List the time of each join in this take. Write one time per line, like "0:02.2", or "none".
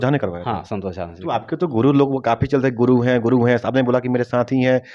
none